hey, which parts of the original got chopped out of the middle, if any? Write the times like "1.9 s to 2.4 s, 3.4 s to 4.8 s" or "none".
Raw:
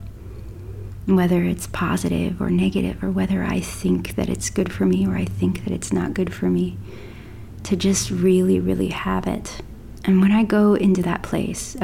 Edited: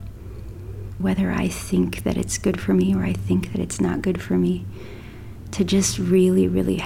1.0 s to 3.1 s